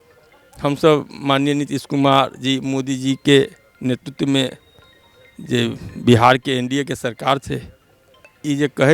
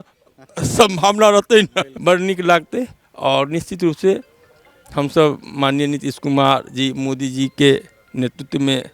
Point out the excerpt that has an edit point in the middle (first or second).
second